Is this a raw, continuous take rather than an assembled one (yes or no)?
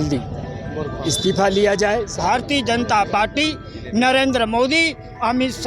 no